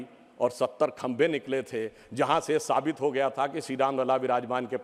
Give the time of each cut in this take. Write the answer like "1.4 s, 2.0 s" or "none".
none